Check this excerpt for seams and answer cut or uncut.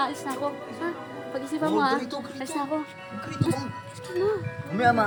uncut